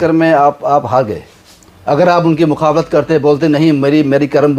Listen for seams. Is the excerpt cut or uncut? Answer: uncut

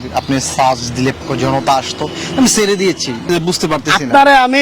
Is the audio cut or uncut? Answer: cut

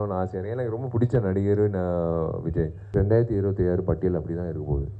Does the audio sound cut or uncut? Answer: cut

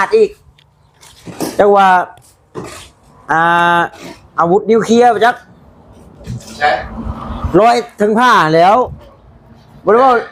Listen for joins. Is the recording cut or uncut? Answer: uncut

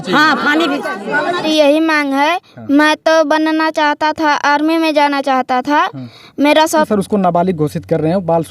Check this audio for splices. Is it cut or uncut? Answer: cut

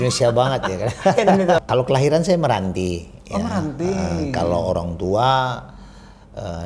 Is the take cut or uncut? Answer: cut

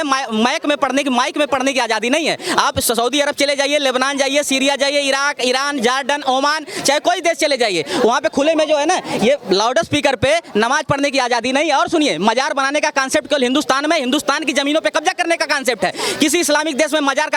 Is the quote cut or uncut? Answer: uncut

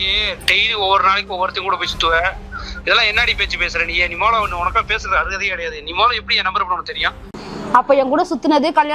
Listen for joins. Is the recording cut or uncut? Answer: cut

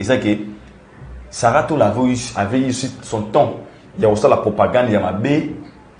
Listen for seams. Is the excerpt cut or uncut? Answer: uncut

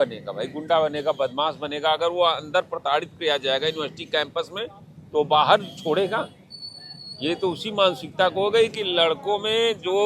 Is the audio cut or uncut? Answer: uncut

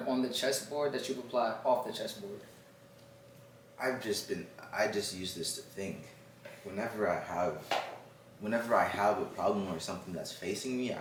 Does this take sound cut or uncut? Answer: uncut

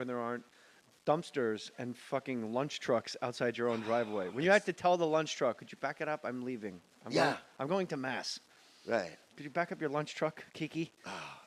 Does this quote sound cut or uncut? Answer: uncut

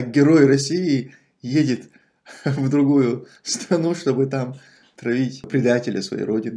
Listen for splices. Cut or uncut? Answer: cut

